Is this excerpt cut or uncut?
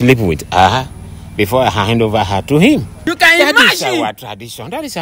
cut